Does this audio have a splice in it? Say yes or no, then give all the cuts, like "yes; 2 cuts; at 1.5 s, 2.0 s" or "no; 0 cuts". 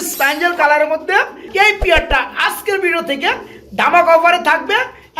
yes; 1 cut; at 1.5 s